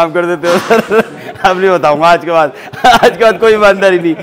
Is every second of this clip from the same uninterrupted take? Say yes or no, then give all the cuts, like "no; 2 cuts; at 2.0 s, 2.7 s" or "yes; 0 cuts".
yes; 0 cuts